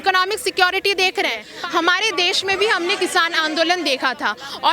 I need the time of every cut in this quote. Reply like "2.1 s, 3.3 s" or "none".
1.5 s